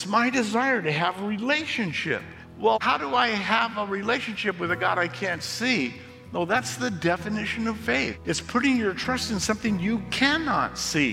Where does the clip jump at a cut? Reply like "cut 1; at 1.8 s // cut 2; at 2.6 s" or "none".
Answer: cut 1; at 2.8 s // cut 2; at 8.2 s